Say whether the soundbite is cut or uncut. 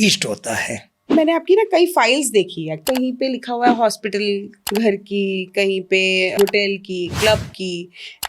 cut